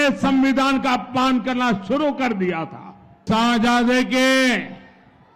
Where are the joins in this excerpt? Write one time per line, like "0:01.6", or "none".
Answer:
0:03.2